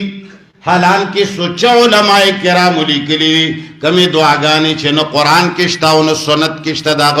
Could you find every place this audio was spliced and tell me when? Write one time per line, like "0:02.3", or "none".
none